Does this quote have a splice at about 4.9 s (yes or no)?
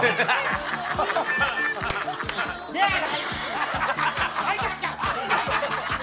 no